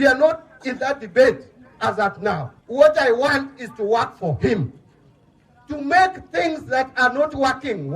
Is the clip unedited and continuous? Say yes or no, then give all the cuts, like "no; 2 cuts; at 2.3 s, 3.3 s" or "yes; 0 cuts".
no; 1 cut; at 2.6 s